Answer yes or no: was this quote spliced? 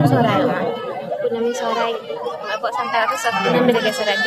no